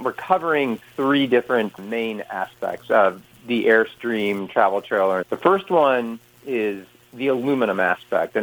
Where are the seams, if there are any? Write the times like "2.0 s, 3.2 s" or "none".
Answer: 5.3 s